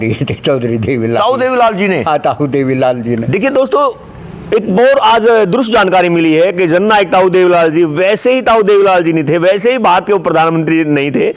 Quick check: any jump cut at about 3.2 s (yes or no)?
no